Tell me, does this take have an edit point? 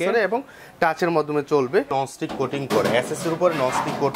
yes; 1 cut; at 1.9 s

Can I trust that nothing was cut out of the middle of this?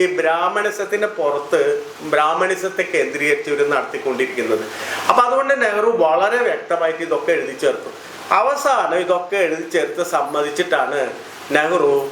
yes; 0 cuts

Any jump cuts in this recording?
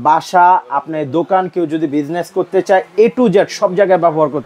no; 0 cuts

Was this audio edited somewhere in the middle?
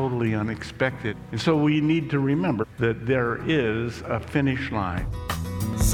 yes; 3 cuts; at 1.1 s, 2.6 s, 5.0 s

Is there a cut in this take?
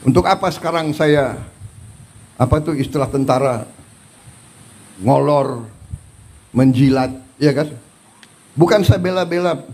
no; 0 cuts

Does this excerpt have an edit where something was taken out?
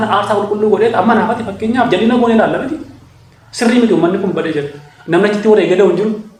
no; 0 cuts

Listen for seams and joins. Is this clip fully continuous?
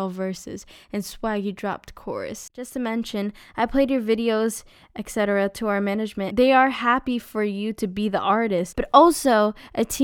no; 3 cuts; at 2.7 s, 6.3 s, 8.8 s

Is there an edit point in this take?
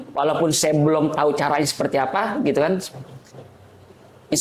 no; 0 cuts

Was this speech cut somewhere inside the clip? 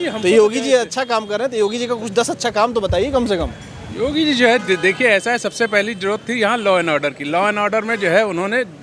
no; 0 cuts

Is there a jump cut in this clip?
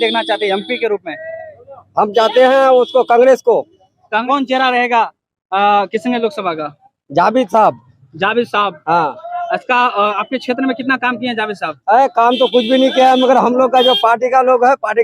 yes; 1 cut; at 4.2 s

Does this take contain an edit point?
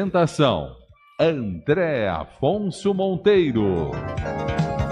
yes; 1 cut; at 4.0 s

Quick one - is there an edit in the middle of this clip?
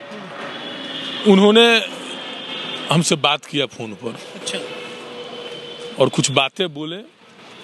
no; 0 cuts

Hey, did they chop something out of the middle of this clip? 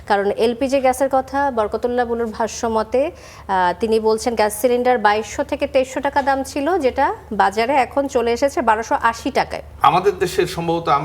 yes; 1 cut; at 9.7 s

